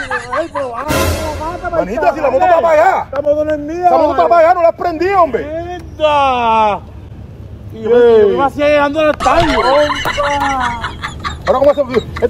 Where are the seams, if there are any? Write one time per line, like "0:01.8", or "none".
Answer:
none